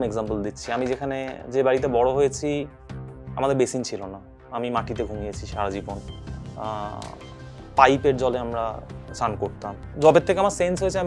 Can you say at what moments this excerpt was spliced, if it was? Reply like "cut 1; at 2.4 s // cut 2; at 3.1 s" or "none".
cut 1; at 9.8 s